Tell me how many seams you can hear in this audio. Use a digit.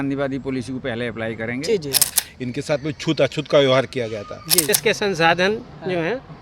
2